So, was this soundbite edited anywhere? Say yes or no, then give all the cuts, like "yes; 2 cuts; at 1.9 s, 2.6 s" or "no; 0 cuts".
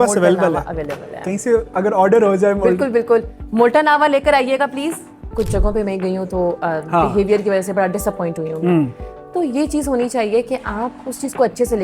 yes; 1 cut; at 5.2 s